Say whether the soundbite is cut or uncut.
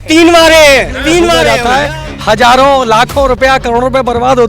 cut